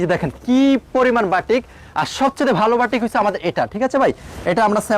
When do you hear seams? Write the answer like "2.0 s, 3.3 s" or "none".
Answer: none